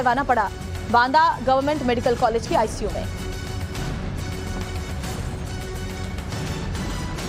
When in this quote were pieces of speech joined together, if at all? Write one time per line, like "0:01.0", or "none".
0:05.8